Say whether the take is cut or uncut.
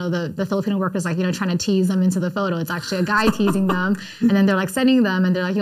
uncut